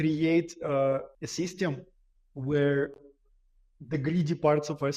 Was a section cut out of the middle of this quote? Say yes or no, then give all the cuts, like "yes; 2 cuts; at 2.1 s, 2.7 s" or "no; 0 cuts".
yes; 1 cut; at 1.2 s